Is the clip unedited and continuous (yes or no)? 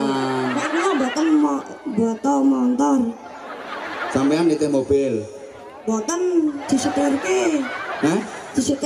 yes